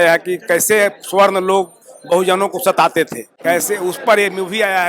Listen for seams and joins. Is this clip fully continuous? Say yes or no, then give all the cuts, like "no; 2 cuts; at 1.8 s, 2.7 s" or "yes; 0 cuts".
no; 1 cut; at 3.2 s